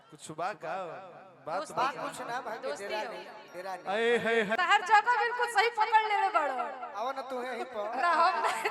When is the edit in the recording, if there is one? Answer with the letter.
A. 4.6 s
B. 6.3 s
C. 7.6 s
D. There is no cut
A